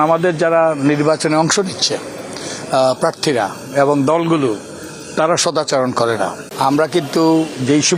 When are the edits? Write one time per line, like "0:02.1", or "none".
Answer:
0:06.4